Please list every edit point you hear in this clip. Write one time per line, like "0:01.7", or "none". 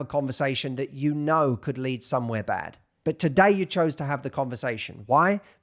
0:02.8